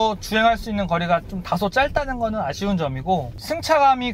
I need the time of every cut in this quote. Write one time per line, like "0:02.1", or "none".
none